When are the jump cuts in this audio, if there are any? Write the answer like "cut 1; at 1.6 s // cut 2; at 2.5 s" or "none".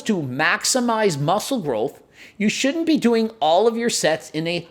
none